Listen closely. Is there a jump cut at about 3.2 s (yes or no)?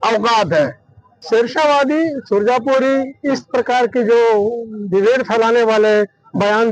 no